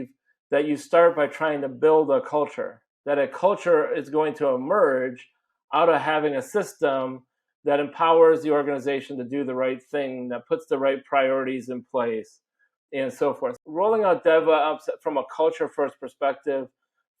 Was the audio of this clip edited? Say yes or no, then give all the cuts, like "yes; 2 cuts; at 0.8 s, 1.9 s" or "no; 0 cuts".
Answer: yes; 1 cut; at 13.6 s